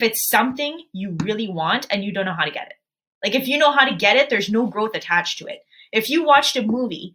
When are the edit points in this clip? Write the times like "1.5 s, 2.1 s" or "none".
none

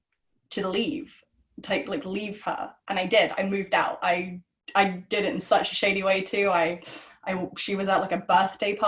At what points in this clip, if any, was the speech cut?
none

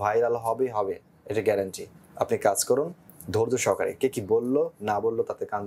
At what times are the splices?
none

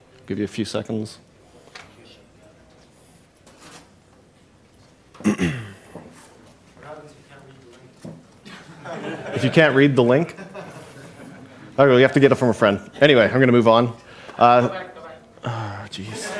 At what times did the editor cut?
11.2 s

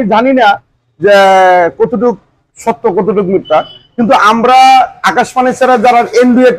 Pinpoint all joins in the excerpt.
none

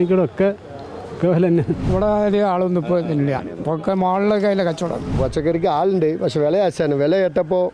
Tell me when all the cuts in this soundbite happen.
1.9 s, 5.1 s

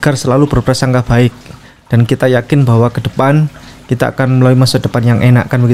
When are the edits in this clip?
none

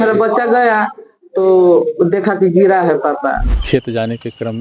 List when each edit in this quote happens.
3.5 s

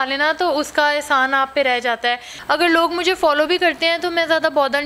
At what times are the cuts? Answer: 2.3 s

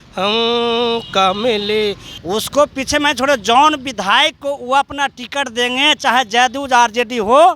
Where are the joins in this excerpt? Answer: 2.1 s

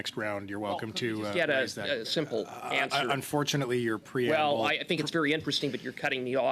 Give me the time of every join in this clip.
none

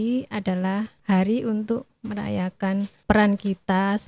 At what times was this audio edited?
0.9 s, 1.9 s, 3.0 s

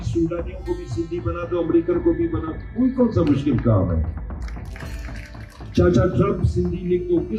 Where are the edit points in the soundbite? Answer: none

